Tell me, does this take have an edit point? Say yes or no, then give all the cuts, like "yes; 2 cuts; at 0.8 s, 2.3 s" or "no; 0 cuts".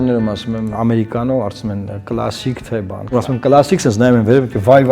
yes; 1 cut; at 3.0 s